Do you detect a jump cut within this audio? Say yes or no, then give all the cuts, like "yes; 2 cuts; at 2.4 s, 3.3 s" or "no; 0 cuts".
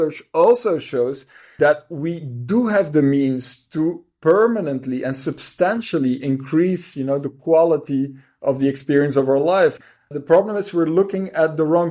yes; 2 cuts; at 1.5 s, 9.9 s